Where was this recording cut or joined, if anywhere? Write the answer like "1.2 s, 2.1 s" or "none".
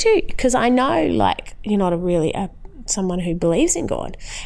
1.5 s